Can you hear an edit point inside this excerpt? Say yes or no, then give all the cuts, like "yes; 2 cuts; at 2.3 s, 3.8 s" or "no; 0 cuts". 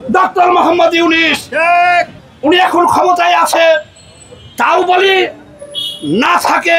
yes; 1 cut; at 2.1 s